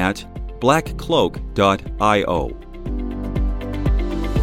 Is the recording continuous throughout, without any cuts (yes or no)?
no